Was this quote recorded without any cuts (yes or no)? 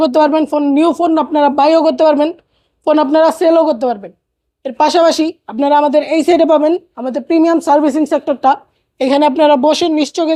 yes